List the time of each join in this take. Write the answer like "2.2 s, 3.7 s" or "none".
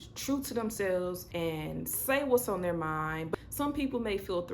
1.2 s, 3.2 s